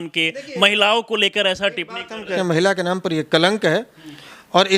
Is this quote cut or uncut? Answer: cut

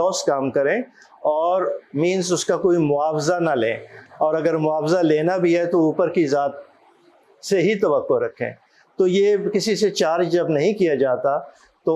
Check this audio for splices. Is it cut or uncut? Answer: uncut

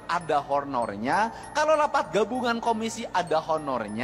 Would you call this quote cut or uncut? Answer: uncut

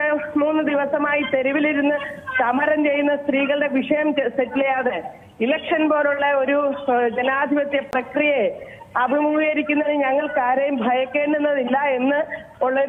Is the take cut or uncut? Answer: uncut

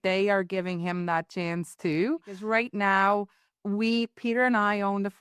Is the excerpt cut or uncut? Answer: cut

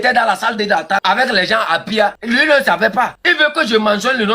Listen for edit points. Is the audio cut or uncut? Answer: cut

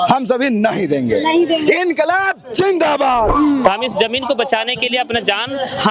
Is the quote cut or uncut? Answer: cut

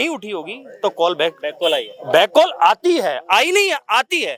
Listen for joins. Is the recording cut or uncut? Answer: uncut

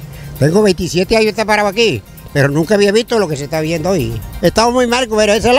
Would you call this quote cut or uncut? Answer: cut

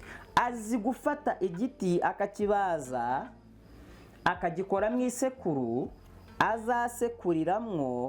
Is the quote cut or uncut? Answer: uncut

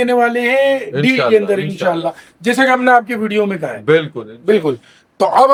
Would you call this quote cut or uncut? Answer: uncut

